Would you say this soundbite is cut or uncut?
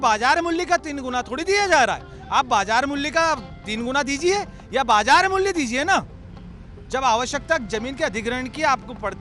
uncut